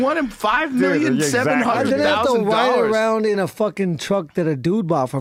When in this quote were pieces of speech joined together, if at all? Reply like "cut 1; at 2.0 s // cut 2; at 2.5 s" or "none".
none

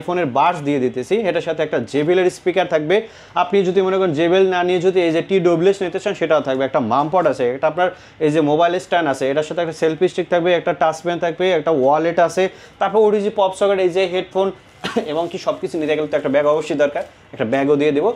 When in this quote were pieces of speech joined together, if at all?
none

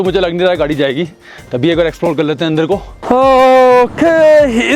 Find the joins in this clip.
cut 1; at 2.9 s

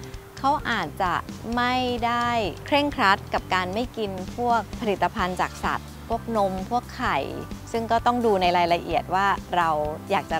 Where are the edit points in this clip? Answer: cut 1; at 2.6 s // cut 2; at 4.8 s // cut 3; at 7.6 s

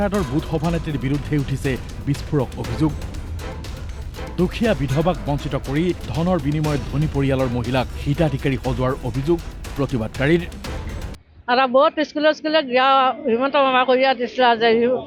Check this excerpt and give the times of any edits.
none

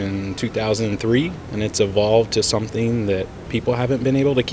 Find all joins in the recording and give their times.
cut 1; at 1.4 s // cut 2; at 3.4 s

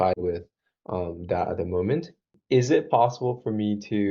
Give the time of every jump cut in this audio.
cut 1; at 2.3 s

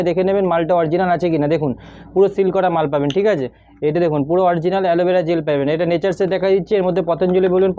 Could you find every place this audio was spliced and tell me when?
none

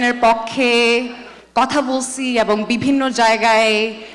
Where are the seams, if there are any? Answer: none

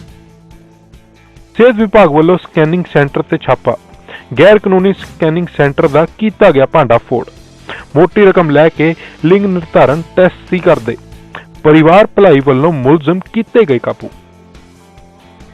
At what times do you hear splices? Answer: cut 1; at 1.3 s

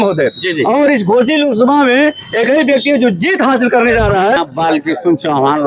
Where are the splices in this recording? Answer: cut 1; at 4.4 s

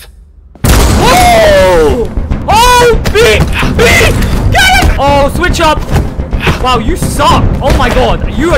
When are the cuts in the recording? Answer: cut 1; at 2.3 s // cut 2; at 4.9 s // cut 3; at 7.5 s

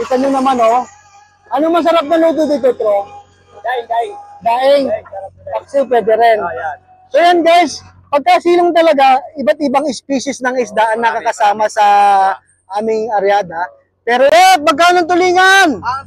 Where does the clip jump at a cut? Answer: cut 1; at 14.3 s

